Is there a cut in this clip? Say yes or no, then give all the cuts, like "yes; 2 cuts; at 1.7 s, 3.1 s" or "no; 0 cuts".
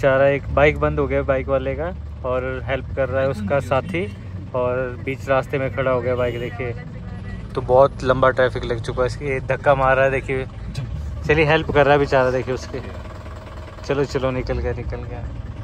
no; 0 cuts